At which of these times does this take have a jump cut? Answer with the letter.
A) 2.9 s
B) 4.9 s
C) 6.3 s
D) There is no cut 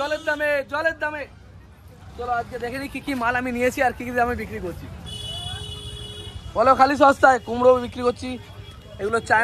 D